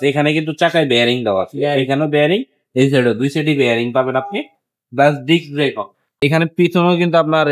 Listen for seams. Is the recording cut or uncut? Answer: cut